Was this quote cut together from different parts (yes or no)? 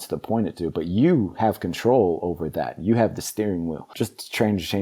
yes